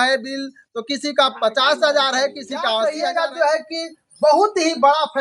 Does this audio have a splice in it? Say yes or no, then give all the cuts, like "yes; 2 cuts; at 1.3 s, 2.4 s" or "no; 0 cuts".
yes; 1 cut; at 2.7 s